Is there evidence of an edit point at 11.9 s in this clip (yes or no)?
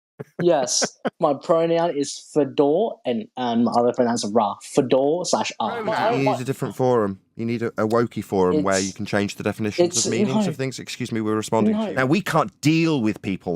yes